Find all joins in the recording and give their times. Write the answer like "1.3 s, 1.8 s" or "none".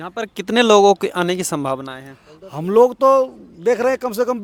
none